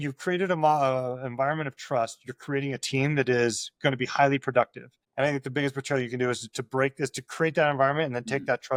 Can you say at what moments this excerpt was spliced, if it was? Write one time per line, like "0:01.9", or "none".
none